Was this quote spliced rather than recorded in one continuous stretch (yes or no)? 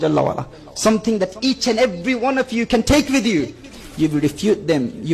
yes